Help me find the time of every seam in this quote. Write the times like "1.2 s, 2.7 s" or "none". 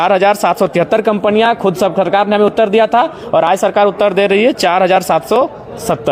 none